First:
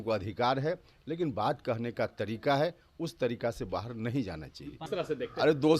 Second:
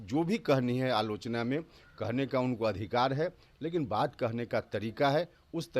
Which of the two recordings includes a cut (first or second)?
first